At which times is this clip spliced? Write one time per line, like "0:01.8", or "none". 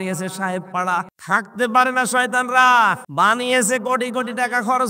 0:01.1
0:03.0